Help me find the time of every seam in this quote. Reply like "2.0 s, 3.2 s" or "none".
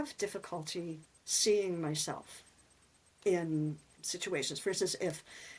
none

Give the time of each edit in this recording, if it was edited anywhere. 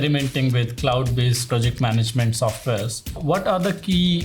1.4 s, 3.2 s

